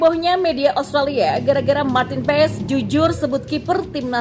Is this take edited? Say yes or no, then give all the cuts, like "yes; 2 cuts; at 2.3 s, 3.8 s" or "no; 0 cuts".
no; 0 cuts